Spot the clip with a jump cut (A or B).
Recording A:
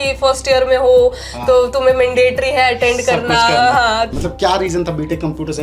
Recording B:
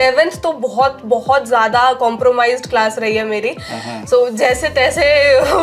A